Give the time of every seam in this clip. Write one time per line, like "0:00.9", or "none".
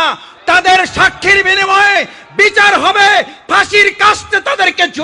none